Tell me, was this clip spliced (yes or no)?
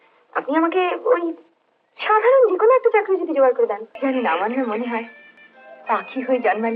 yes